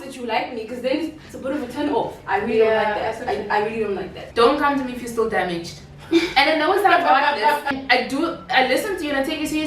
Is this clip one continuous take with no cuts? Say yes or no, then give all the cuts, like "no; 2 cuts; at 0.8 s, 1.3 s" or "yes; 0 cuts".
no; 2 cuts; at 4.2 s, 7.7 s